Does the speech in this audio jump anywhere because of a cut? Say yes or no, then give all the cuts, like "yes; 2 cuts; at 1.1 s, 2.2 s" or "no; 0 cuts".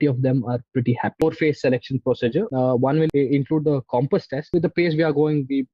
yes; 3 cuts; at 1.2 s, 2.9 s, 4.5 s